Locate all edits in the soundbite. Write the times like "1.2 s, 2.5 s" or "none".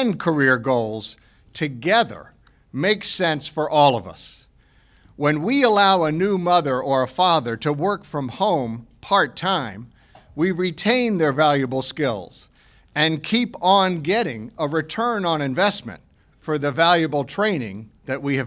3.1 s